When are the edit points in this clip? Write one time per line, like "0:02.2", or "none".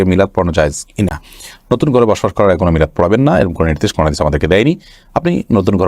none